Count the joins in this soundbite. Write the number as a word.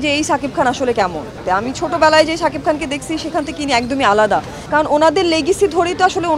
two